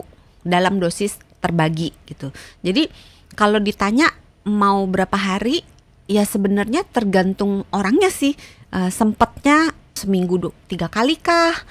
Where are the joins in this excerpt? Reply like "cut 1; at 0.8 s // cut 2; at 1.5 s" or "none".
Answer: cut 1; at 9.9 s